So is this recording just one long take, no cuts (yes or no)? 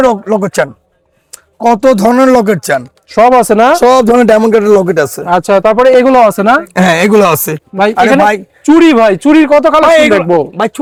yes